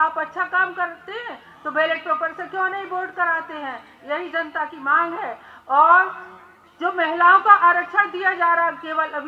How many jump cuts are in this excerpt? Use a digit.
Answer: 0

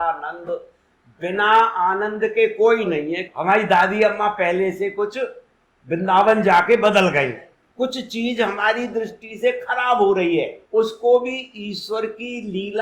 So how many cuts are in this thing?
2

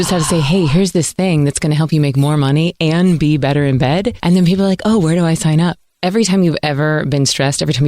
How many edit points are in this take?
1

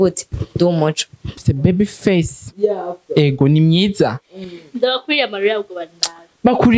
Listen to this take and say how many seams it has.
1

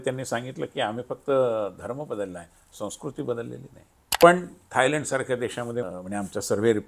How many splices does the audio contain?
2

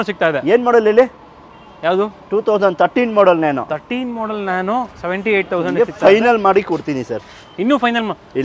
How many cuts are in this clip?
0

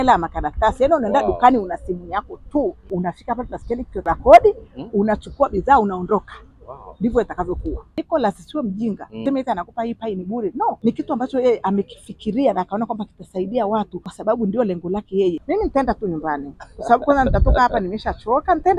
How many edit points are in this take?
7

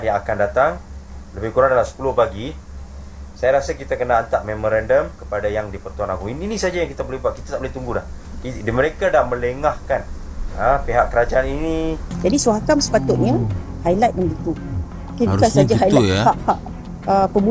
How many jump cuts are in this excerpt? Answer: 1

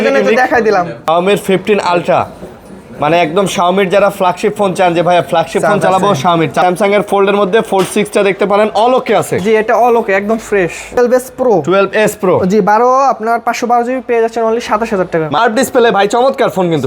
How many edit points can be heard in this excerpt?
4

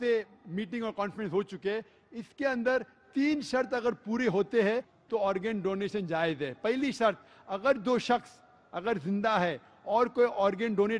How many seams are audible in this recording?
1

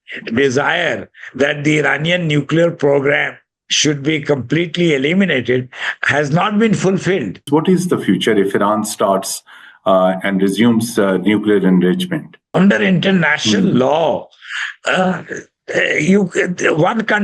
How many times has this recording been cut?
2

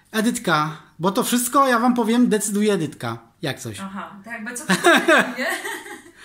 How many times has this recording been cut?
0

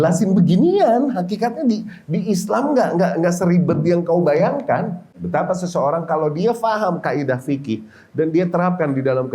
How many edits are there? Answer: 1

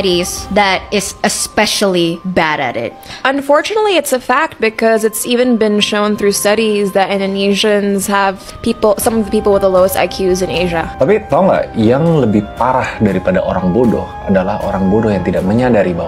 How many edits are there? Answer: 1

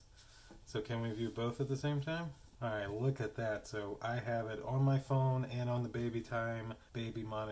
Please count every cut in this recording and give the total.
1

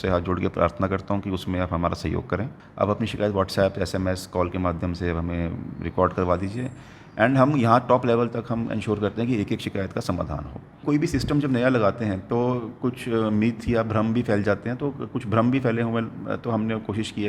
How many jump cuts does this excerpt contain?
2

